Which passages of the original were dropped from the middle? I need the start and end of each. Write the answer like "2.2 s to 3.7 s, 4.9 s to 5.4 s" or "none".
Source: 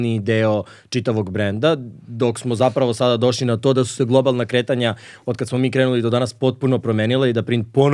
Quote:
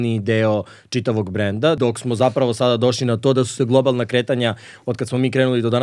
1.8 s to 2.2 s